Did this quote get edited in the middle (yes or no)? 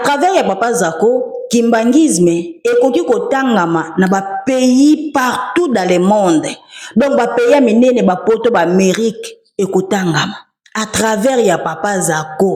no